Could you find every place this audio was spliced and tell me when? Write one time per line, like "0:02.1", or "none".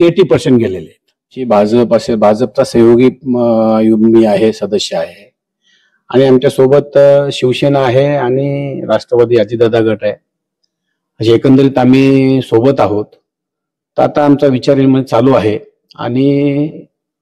0:01.4